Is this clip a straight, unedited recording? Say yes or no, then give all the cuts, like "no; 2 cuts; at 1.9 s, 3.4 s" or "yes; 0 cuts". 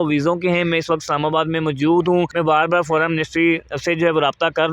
no; 1 cut; at 2.3 s